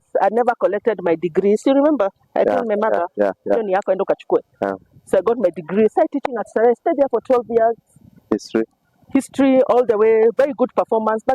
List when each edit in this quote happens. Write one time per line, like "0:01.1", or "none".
none